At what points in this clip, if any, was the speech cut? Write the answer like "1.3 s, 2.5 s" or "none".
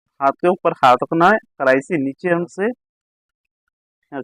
2.5 s

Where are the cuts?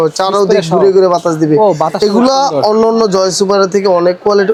none

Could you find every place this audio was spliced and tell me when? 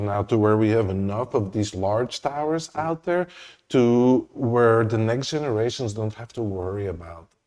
none

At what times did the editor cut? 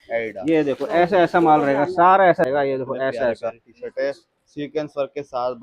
2.5 s

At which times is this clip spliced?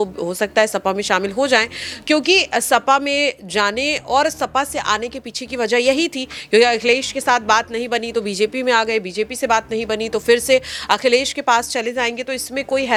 none

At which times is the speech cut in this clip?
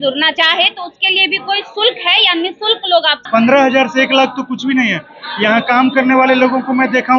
3.2 s

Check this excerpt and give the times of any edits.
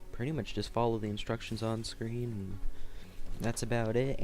2.5 s

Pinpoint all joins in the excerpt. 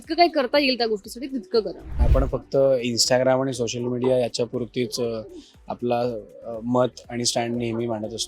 2.0 s

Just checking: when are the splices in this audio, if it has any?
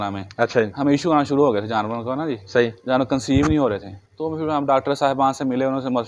none

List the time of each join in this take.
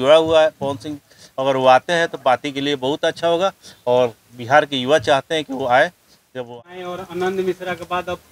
6.4 s

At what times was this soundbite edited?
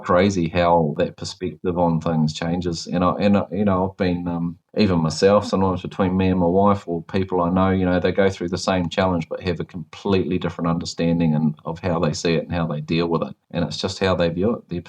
1.0 s

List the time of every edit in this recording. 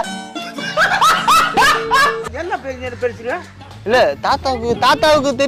2.2 s

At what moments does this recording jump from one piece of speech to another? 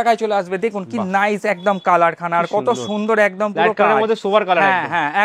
none

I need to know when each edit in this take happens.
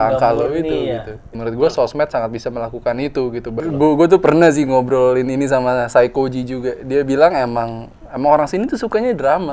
1.3 s, 3.5 s

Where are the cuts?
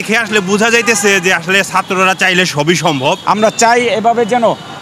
3.2 s

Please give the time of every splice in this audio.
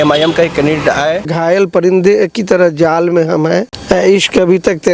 1.3 s, 3.7 s

